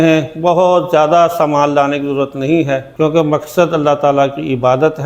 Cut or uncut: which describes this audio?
uncut